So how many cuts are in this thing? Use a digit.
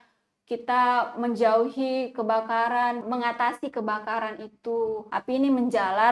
2